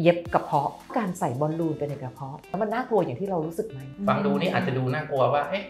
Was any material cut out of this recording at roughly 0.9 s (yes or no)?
yes